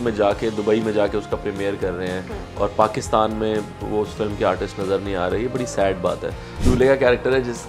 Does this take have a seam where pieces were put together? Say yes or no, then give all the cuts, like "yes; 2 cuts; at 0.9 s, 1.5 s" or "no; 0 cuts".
yes; 1 cut; at 6.5 s